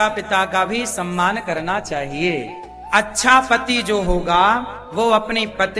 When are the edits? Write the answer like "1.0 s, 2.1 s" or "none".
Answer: 2.8 s